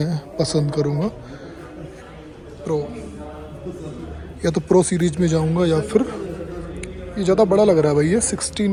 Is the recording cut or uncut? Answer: uncut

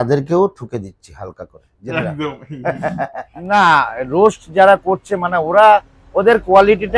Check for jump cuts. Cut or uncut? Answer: cut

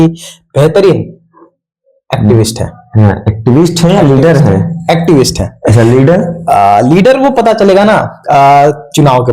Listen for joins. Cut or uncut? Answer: uncut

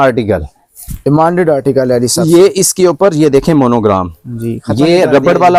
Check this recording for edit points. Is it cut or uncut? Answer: uncut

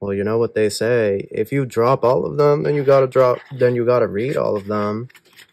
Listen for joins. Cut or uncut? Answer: uncut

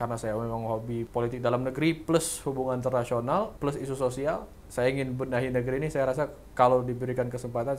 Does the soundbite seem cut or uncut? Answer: cut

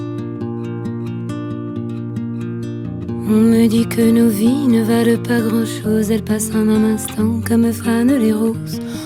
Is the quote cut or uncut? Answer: uncut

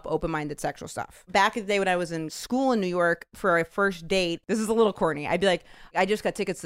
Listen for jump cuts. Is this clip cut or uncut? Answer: cut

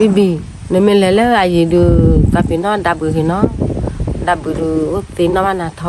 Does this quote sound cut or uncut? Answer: uncut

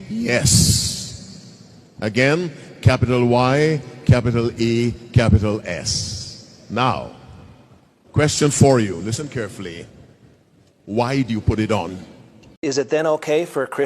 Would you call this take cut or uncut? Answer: cut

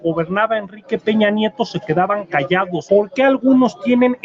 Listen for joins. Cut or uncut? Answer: cut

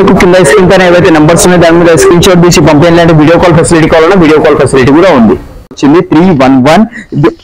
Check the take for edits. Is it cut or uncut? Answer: cut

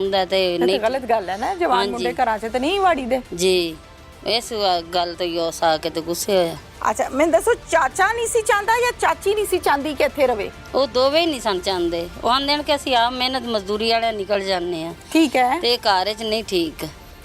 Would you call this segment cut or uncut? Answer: uncut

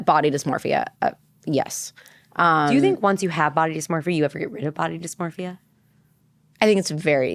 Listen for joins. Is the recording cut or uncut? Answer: uncut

